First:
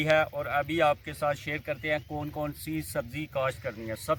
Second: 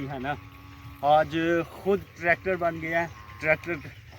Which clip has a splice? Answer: second; 1 cut; at 3.2 s

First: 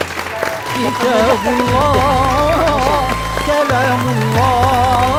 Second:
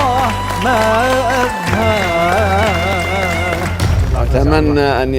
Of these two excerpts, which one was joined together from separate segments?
second; 1 cut; at 4.0 s

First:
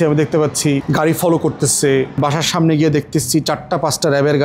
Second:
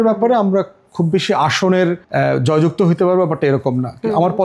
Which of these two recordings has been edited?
first; 2 cuts; at 0.8 s, 2.2 s

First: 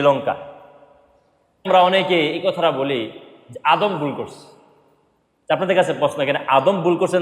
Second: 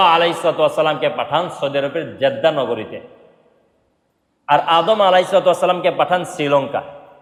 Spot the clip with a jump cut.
first; 1 cut; at 1.7 s

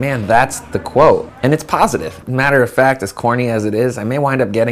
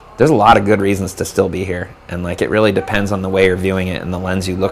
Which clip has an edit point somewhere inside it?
first; 1 cut; at 2.2 s

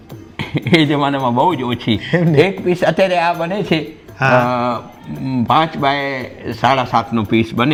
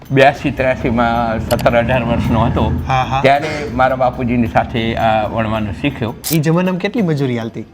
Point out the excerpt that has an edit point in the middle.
second; 1 cut; at 6.2 s

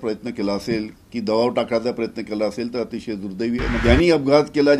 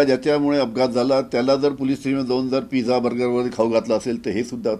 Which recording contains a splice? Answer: first; 2 cuts; at 1.0 s, 3.8 s

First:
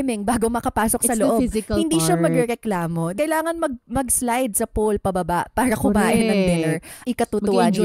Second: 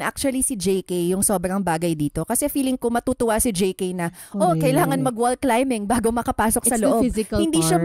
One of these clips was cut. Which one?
first; 2 cuts; at 3.1 s, 6.9 s

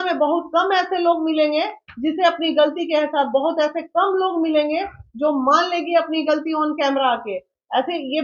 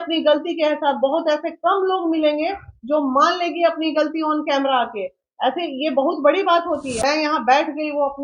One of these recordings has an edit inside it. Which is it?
second; 1 cut; at 6.9 s

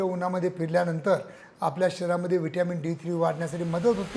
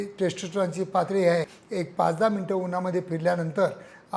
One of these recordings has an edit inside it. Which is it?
second; 1 cut; at 1.6 s

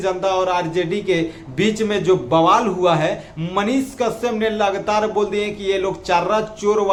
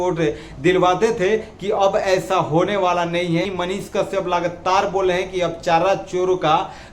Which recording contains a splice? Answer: second; 1 cut; at 3.4 s

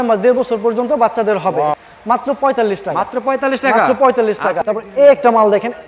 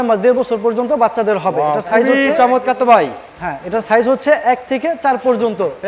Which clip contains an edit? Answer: first; 2 cuts; at 1.8 s, 4.6 s

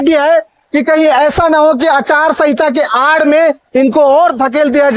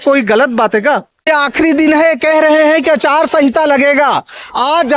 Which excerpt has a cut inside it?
second; 1 cut; at 1.3 s

